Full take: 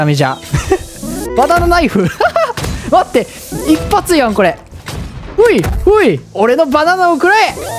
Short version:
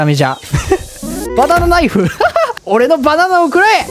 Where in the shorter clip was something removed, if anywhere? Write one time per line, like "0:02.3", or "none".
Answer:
0:02.6